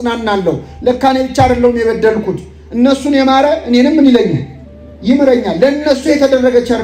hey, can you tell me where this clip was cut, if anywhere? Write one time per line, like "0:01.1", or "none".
none